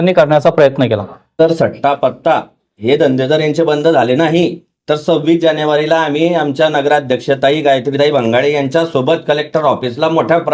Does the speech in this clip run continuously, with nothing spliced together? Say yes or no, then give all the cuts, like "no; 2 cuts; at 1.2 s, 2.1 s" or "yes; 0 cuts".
no; 1 cut; at 1.2 s